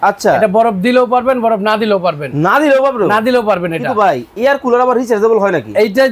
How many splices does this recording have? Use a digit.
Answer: 0